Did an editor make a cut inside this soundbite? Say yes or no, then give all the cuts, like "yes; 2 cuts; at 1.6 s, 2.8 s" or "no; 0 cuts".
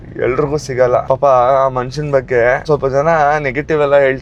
no; 0 cuts